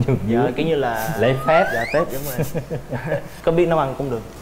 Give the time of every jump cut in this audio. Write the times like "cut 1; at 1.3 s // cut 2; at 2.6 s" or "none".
none